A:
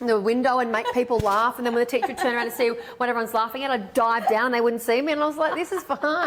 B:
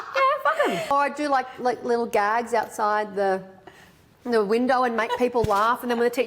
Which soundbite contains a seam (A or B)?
B